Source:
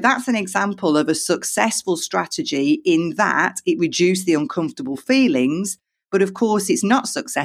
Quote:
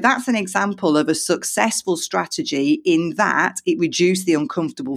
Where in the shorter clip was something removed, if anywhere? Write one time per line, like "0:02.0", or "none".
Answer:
none